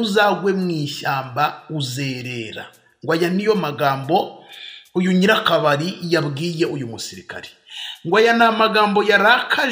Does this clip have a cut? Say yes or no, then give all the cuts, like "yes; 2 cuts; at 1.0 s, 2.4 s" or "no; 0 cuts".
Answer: no; 0 cuts